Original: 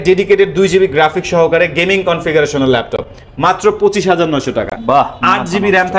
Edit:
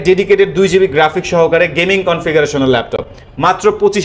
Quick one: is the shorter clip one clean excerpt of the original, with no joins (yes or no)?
yes